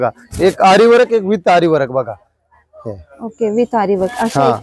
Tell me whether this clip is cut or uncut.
uncut